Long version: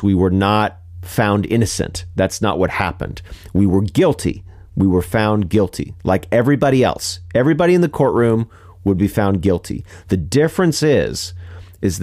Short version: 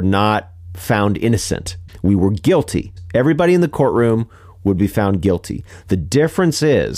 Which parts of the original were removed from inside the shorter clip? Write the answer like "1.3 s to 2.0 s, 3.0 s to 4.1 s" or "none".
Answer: 2.0 s to 3.2 s, 4.4 s to 7.1 s